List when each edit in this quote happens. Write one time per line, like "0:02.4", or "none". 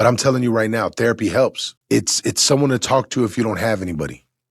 0:01.7